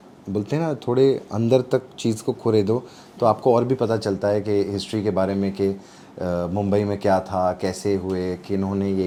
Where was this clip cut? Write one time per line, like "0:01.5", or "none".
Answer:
none